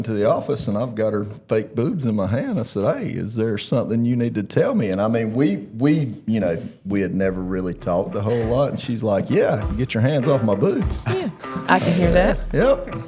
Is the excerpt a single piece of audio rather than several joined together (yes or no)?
yes